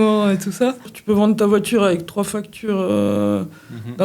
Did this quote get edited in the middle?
yes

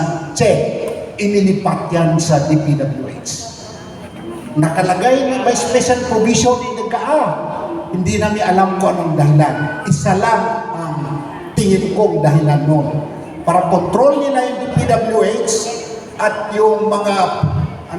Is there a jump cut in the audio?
no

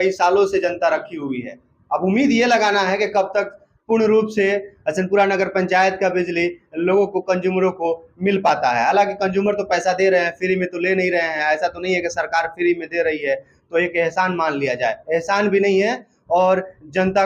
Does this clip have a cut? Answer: no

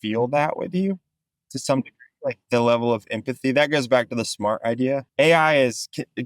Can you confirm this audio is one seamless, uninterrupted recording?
no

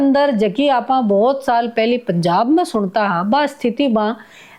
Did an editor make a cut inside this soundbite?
no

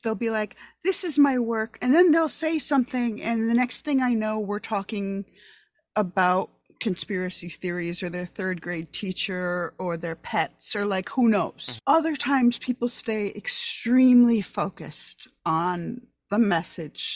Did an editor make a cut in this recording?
no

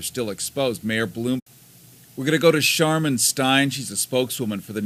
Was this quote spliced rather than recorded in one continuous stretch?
no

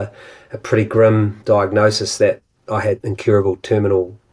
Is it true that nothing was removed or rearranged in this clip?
no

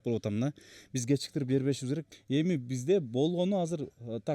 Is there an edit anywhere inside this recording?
yes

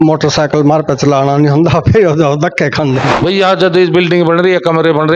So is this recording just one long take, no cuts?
no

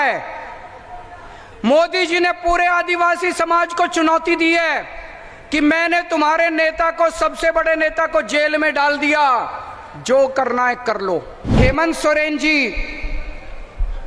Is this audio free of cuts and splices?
no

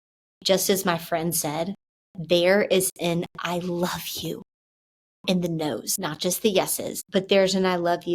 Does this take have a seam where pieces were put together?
yes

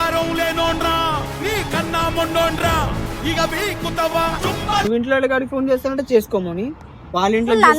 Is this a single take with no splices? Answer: yes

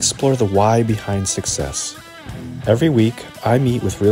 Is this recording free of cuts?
yes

